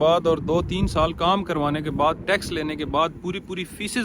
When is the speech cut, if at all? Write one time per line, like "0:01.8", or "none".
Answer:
none